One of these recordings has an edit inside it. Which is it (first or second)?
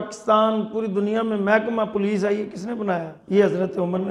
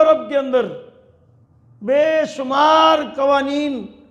first